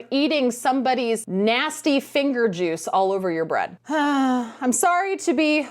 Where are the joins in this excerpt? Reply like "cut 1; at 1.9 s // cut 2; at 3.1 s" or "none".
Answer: cut 1; at 3.8 s